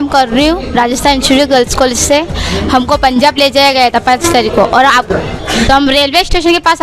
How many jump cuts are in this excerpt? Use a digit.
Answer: 1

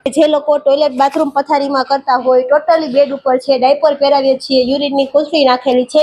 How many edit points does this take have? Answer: 0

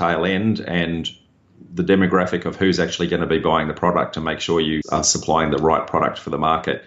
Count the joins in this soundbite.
1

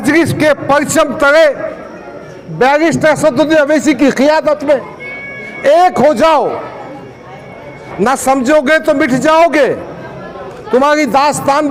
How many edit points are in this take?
0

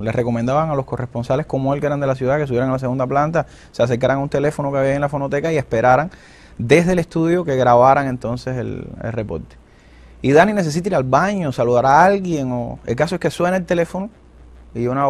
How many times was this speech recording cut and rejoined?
1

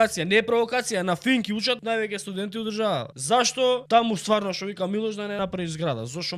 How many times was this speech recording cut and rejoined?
4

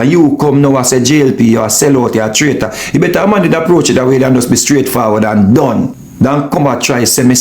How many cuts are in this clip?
1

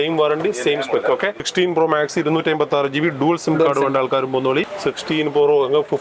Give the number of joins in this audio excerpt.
2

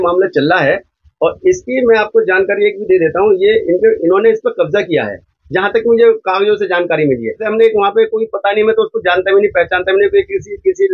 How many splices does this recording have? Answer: 1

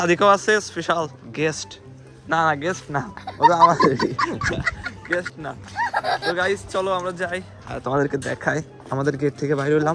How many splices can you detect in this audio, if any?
0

